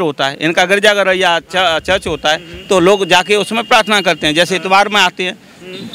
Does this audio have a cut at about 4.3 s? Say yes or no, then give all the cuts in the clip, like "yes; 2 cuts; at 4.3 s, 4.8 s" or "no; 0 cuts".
no; 0 cuts